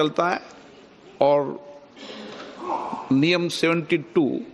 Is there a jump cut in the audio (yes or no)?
yes